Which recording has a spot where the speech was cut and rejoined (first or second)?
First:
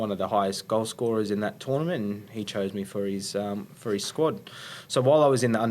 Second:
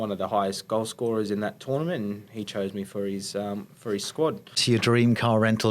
second